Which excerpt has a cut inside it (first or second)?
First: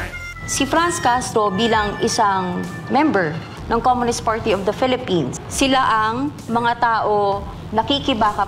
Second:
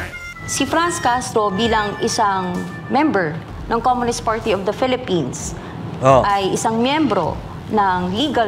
first